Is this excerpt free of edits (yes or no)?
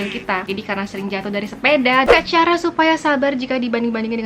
no